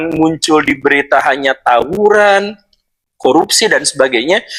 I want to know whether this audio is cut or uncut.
uncut